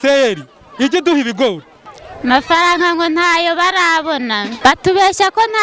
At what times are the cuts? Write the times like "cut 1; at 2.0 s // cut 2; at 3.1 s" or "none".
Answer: cut 1; at 1.7 s // cut 2; at 4.5 s